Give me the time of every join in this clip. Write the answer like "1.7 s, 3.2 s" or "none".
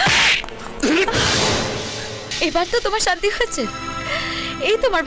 2.2 s